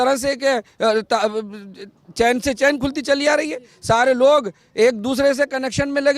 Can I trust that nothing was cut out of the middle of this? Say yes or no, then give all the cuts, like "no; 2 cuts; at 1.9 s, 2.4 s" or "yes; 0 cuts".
yes; 0 cuts